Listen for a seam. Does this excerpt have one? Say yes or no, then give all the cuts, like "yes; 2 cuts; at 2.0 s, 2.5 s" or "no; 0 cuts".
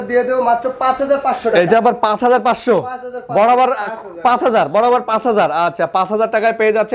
no; 0 cuts